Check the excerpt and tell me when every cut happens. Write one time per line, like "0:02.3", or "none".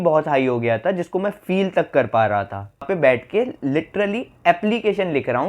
0:02.9